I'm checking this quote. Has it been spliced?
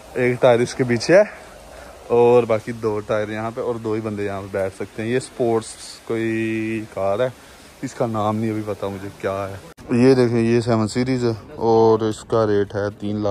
yes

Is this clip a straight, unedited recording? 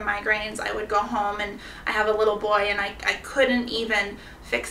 yes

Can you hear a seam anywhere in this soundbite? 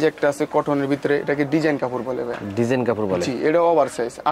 no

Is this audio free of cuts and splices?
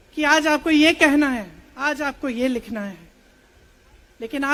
yes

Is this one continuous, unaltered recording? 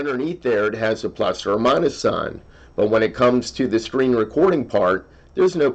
yes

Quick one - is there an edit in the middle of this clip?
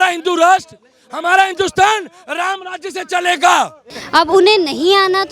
yes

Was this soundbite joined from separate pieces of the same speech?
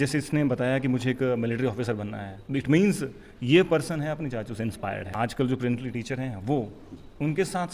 yes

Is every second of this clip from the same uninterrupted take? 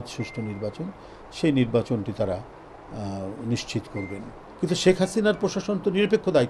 no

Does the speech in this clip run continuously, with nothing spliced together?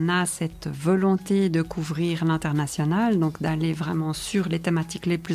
yes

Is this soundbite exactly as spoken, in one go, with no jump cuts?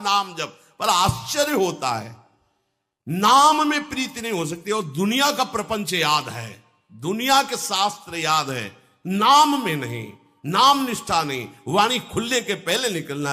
yes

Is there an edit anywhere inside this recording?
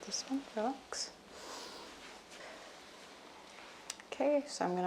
yes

